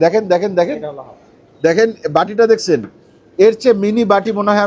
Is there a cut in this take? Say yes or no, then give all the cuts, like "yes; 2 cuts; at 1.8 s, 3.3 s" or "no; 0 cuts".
no; 0 cuts